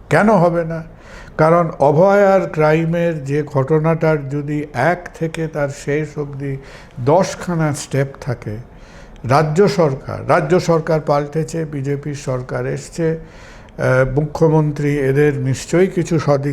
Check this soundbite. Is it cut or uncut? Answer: uncut